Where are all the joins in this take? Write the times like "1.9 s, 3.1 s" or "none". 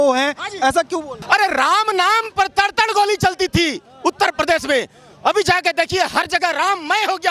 1.1 s

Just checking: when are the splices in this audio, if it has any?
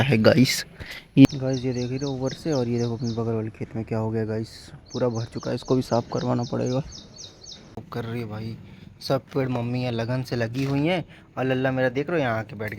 1.3 s, 7.8 s

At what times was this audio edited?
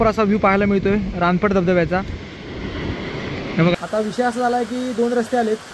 3.8 s

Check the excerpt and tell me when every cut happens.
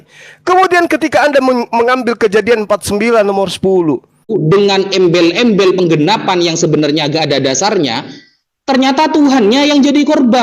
4.3 s

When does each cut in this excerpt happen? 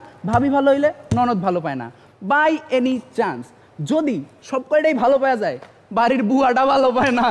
none

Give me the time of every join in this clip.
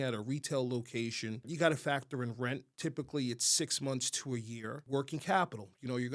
1.5 s, 2.7 s, 4.8 s

